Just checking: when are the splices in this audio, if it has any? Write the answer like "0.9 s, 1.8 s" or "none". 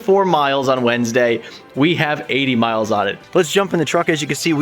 3.1 s